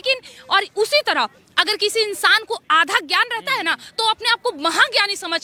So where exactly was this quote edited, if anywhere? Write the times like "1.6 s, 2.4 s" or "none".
none